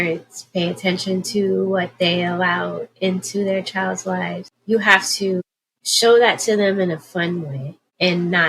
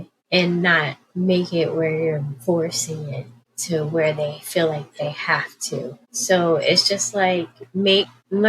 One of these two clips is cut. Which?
first; 1 cut; at 4.5 s

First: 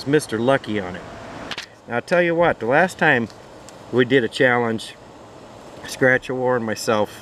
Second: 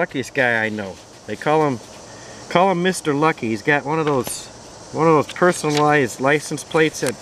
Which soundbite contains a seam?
first; 1 cut; at 1.5 s

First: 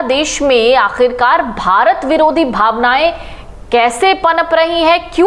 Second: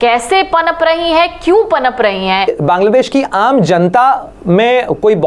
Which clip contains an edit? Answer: second; 1 cut; at 2.5 s

